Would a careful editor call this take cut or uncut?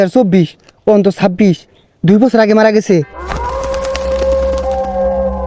cut